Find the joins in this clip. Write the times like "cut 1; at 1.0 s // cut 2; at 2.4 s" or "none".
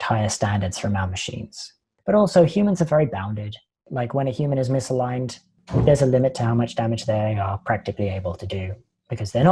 cut 1; at 1.9 s